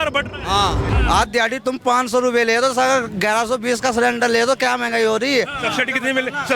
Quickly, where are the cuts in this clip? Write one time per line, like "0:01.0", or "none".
0:00.9